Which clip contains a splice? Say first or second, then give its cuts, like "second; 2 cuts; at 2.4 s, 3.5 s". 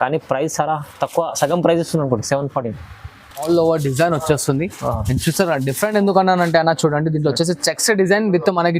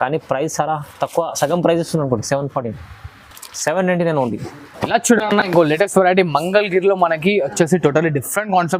first; 1 cut; at 3.4 s